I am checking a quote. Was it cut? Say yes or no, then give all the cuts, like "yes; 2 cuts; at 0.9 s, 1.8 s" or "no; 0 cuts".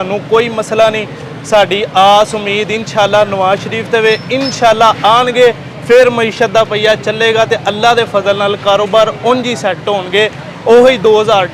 no; 0 cuts